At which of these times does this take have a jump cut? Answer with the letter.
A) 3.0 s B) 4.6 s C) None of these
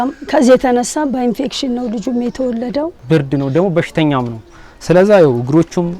A